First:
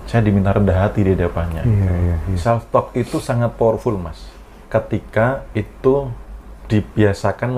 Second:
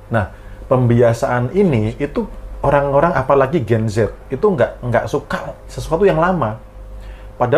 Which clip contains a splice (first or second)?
first